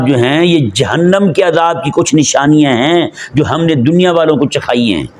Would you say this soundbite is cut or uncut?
uncut